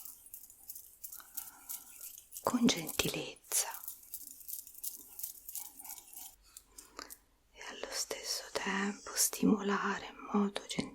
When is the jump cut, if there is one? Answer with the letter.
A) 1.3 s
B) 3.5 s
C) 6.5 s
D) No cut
C